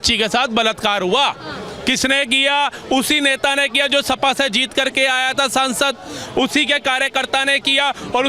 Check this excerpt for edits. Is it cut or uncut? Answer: uncut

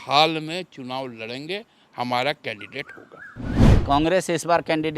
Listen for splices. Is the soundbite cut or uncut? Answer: cut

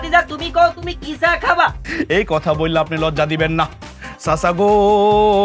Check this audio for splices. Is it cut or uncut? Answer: cut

